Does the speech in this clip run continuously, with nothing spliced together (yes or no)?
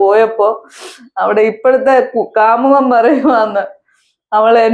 yes